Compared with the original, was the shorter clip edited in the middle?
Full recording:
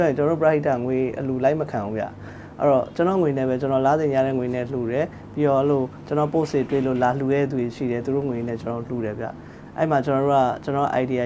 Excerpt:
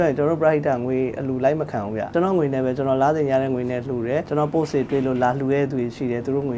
yes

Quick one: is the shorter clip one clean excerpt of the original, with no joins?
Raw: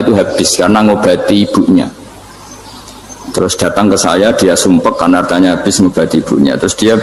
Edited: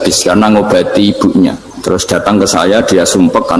no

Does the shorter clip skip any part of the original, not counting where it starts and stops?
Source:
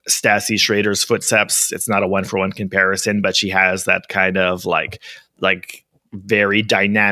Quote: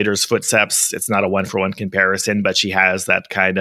no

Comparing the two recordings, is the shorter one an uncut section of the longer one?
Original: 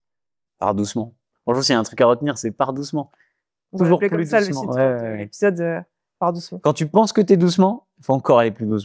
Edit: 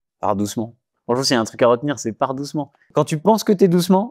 no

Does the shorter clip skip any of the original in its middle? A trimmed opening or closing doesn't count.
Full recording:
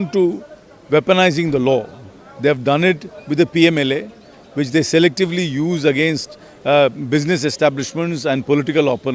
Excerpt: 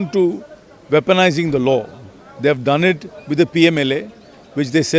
no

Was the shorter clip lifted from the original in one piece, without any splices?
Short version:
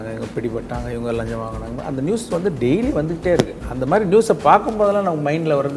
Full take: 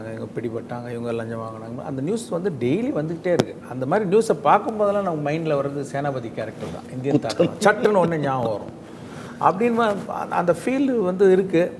yes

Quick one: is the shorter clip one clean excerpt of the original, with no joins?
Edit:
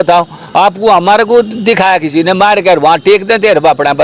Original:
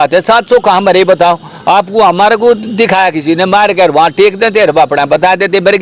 yes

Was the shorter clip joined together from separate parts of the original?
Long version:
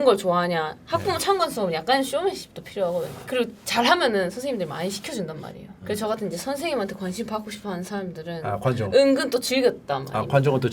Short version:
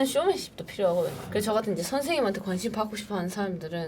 yes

